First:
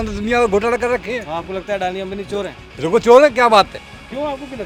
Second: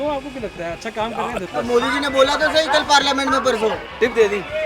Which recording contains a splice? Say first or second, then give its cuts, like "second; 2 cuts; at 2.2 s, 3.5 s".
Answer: second; 1 cut; at 1.4 s